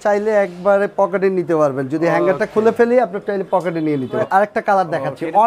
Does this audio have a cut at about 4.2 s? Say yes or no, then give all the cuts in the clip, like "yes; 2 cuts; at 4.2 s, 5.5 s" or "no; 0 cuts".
yes; 1 cut; at 4.2 s